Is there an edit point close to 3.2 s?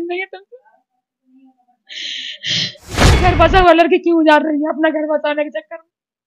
yes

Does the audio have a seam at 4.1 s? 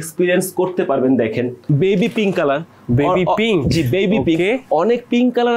no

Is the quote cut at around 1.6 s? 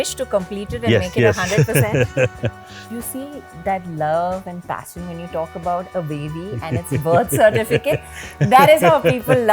no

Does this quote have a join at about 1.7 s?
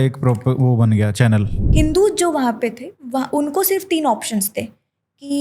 yes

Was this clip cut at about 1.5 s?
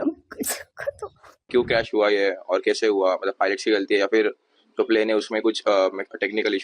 yes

